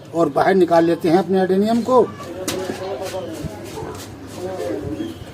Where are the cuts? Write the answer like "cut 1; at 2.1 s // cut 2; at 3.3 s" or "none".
cut 1; at 2.2 s